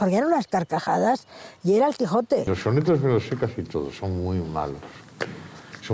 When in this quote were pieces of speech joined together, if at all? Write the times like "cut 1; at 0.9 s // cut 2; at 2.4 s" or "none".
cut 1; at 2.5 s